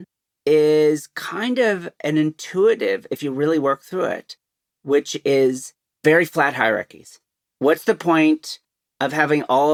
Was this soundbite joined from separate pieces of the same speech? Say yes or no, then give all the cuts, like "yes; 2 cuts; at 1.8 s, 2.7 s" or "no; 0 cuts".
no; 0 cuts